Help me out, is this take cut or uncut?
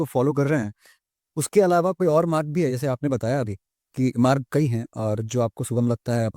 uncut